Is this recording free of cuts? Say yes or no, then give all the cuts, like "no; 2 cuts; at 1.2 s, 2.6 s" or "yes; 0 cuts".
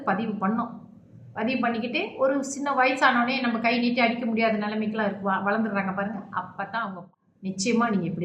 no; 1 cut; at 7.0 s